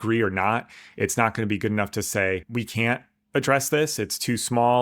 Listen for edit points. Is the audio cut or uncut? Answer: cut